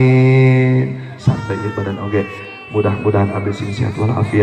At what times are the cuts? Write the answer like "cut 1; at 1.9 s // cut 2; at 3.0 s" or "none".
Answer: cut 1; at 1.1 s